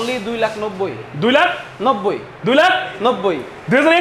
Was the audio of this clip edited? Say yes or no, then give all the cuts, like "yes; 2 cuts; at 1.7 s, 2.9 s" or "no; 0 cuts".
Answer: no; 0 cuts